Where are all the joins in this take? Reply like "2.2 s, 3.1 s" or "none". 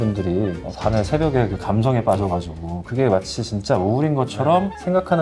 none